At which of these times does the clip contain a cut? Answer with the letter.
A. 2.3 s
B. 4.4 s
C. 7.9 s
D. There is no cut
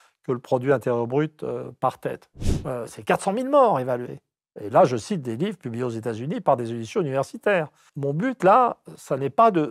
A